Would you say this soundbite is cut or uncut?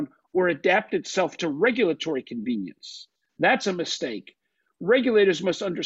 uncut